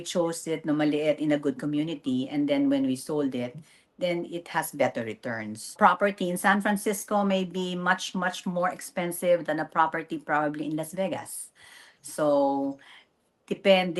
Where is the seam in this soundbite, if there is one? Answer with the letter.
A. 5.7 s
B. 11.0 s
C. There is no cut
A